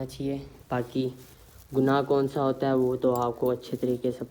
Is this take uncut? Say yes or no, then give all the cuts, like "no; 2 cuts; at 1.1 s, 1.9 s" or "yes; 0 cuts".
yes; 0 cuts